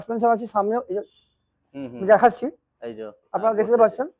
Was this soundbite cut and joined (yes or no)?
no